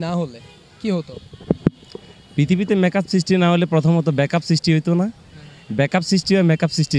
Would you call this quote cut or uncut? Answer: uncut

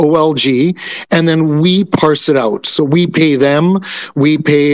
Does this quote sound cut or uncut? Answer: uncut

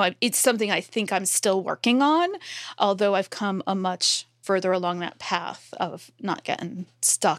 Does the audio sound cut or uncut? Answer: cut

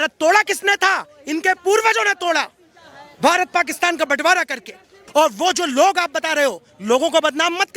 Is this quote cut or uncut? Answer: cut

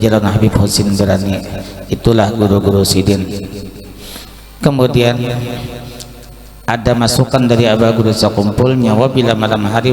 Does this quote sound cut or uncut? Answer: uncut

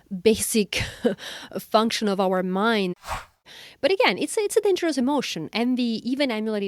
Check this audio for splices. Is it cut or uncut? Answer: cut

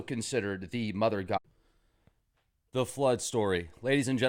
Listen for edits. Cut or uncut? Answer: uncut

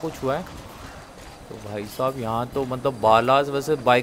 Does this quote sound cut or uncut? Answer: uncut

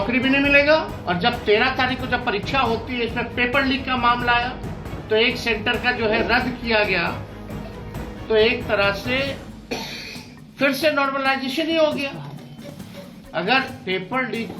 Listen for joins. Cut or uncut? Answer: cut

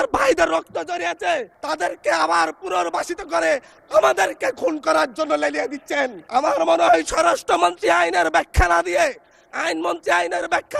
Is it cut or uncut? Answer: cut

